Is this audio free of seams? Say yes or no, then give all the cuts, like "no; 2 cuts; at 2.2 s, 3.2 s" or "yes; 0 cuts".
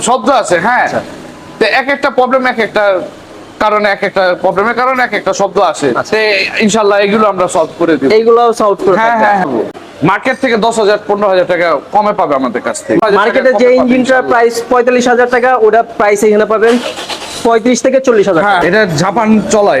no; 3 cuts; at 9.7 s, 13.0 s, 18.6 s